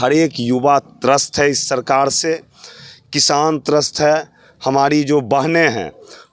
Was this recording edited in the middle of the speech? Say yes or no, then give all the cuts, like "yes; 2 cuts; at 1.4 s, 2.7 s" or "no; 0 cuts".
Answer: no; 0 cuts